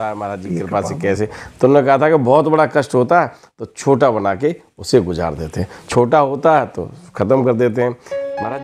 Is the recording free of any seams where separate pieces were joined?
yes; 0 cuts

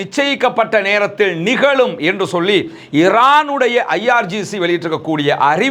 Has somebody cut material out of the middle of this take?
no; 0 cuts

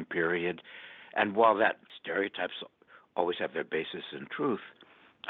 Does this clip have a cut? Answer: yes; 1 cut; at 1.9 s

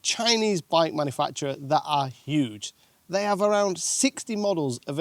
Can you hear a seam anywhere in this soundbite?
no; 0 cuts

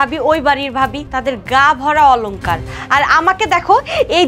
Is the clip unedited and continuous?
no; 1 cut; at 1.1 s

